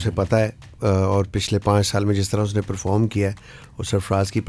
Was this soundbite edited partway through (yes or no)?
no